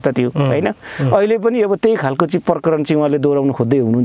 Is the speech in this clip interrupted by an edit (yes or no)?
no